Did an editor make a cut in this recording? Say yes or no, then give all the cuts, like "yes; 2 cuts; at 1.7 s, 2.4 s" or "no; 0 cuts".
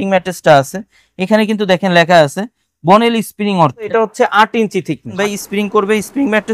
yes; 2 cuts; at 3.9 s, 5.1 s